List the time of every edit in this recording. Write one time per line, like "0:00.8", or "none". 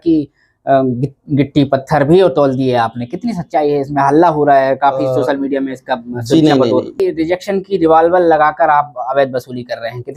0:06.9

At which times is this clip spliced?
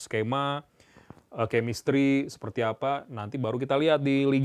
none

